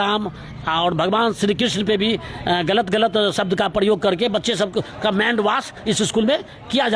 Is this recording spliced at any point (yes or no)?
no